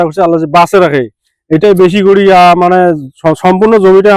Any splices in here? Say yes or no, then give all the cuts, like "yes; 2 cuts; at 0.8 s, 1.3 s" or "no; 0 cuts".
no; 0 cuts